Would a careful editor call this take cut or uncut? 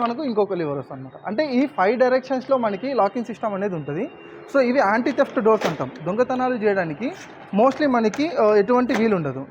uncut